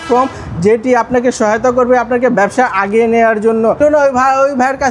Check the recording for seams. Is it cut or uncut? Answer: cut